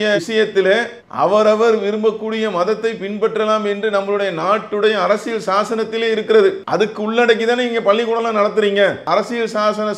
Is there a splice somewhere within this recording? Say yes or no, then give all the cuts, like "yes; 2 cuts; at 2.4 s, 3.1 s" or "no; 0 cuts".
yes; 2 cuts; at 6.6 s, 9.0 s